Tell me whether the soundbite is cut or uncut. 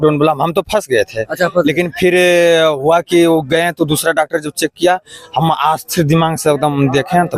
uncut